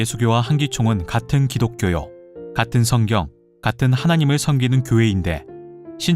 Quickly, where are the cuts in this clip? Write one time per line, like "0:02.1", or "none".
0:03.7

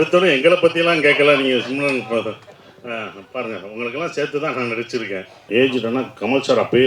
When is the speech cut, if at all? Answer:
0:05.3

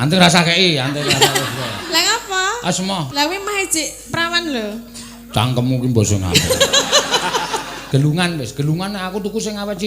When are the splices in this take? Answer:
0:03.1
0:07.8

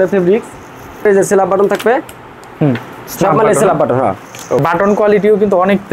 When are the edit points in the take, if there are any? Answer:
0:01.0
0:04.6

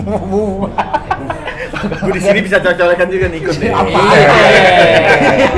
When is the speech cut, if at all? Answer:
none

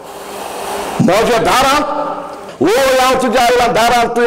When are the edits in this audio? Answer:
0:02.5

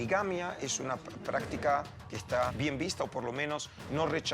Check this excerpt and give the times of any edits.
0:02.5

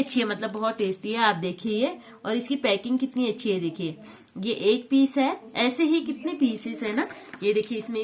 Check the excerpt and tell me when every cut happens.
none

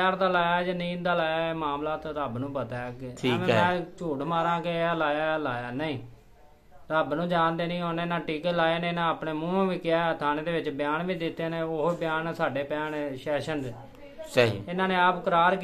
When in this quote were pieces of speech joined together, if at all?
none

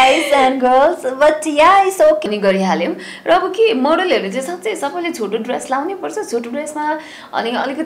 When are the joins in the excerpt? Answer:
0:02.2

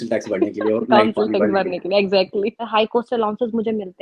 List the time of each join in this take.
0:02.6

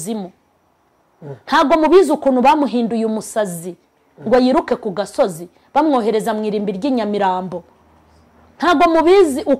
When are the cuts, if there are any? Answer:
none

